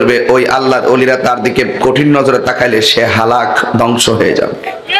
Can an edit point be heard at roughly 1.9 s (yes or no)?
no